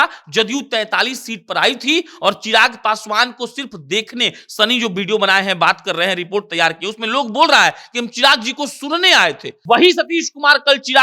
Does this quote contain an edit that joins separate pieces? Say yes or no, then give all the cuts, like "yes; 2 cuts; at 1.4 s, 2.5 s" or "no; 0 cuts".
yes; 1 cut; at 9.5 s